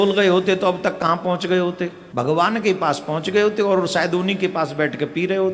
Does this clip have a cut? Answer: yes; 1 cut; at 2.0 s

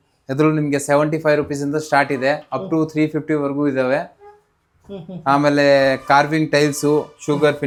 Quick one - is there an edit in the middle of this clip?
no; 0 cuts

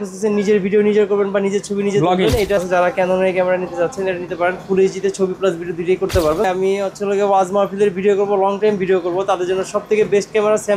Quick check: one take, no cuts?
no; 2 cuts; at 2.6 s, 6.5 s

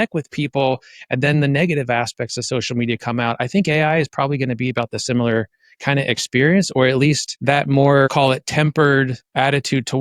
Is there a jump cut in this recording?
yes; 2 cuts; at 7.3 s, 8.1 s

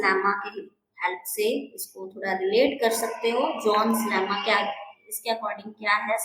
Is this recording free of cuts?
yes; 0 cuts

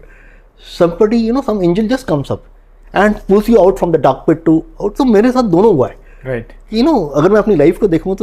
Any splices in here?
no; 0 cuts

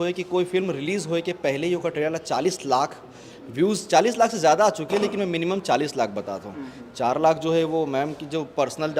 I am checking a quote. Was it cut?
no; 0 cuts

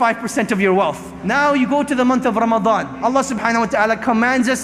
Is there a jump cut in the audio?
yes; 2 cuts; at 1.2 s, 2.9 s

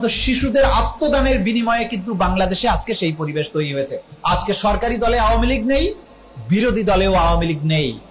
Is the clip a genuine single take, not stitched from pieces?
yes; 0 cuts

